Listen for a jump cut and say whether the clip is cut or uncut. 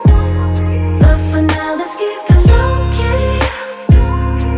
cut